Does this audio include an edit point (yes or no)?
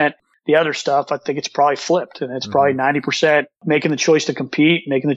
yes